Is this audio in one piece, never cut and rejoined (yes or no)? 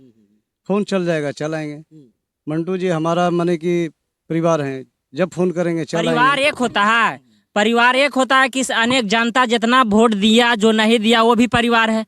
no